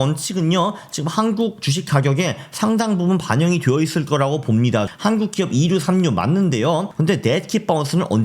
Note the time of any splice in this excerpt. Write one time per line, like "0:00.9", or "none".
0:04.9
0:06.9